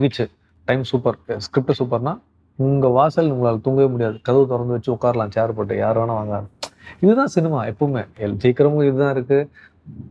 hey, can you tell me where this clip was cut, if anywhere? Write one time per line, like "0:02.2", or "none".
none